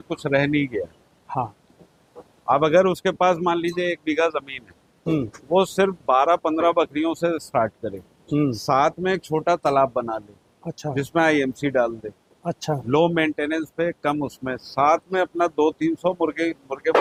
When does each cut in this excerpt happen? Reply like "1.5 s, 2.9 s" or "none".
none